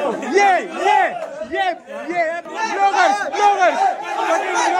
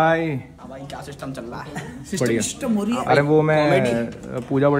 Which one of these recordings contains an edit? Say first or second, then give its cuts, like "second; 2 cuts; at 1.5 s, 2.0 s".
first; 1 cut; at 2.5 s